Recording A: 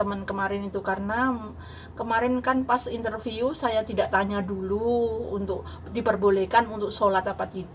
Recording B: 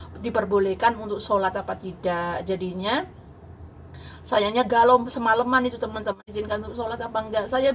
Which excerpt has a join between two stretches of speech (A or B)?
B